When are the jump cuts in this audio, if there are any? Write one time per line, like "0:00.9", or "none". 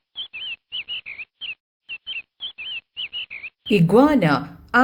none